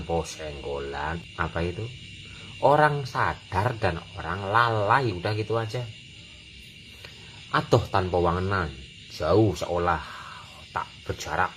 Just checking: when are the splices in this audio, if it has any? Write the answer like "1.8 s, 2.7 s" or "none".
1.2 s